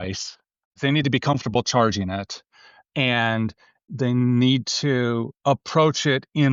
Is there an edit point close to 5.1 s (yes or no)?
no